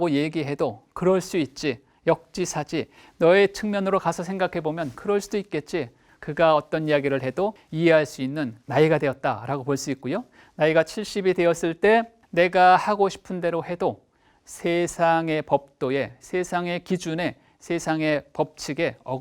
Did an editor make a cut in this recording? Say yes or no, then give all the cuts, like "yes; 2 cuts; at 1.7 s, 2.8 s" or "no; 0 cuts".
yes; 4 cuts; at 6.0 s, 7.6 s, 8.6 s, 12.2 s